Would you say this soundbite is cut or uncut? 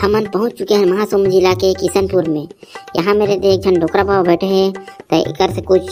uncut